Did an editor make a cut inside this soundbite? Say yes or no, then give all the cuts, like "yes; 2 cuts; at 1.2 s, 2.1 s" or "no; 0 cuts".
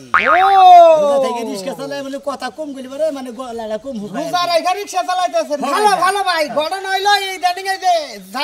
no; 0 cuts